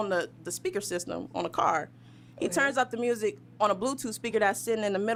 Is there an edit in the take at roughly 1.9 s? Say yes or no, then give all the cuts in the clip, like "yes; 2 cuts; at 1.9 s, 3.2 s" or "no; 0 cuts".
no; 0 cuts